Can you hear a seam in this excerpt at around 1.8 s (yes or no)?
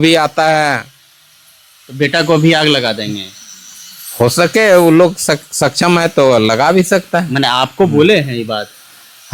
no